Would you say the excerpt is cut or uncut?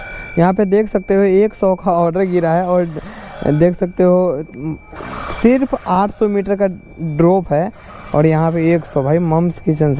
uncut